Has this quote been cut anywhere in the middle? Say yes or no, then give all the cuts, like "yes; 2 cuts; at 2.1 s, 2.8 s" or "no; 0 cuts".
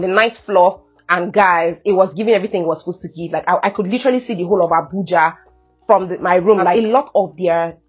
yes; 1 cut; at 6.7 s